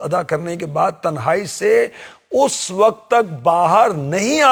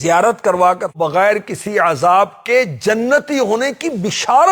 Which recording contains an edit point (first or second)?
second